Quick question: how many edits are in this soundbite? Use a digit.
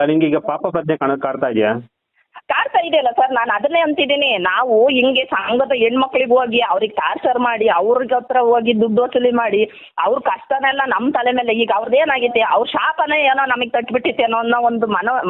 0